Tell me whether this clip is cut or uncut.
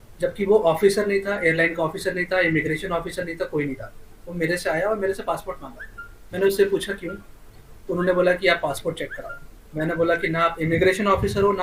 uncut